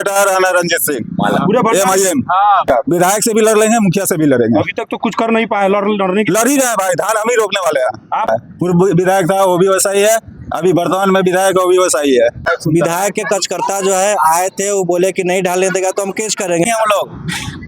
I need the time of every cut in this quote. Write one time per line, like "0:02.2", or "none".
0:02.7
0:08.3
0:12.5
0:16.6